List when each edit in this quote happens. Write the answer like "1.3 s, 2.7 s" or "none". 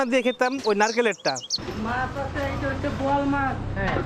1.6 s